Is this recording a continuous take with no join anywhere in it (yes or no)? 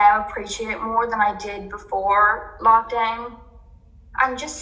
yes